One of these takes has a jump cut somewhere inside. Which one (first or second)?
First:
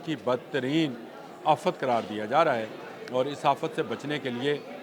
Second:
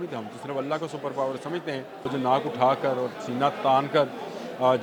second